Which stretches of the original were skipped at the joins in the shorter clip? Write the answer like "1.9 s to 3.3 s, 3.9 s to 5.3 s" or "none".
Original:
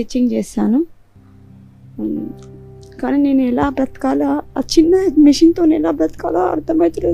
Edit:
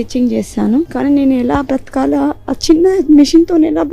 0.9 s to 3.0 s